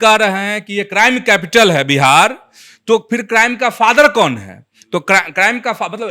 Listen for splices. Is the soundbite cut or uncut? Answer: uncut